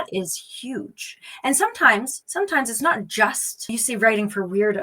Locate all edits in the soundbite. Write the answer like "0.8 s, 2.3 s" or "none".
2.2 s, 3.7 s